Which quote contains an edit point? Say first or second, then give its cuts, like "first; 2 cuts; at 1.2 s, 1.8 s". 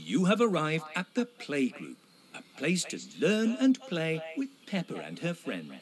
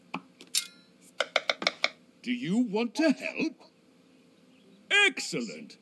second; 1 cut; at 2.1 s